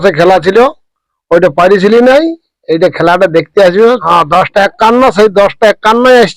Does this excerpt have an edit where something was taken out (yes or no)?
yes